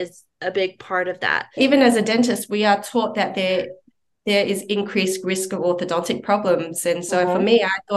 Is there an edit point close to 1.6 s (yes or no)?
yes